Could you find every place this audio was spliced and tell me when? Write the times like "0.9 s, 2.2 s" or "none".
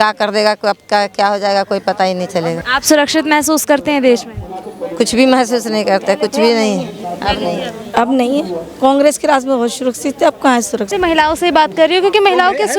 2.6 s, 10.9 s